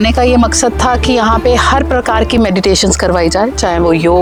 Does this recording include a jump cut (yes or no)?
no